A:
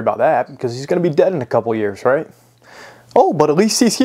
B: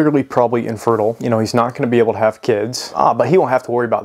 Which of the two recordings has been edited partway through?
B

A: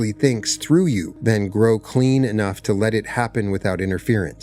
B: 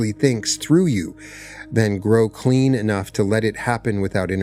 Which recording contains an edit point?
A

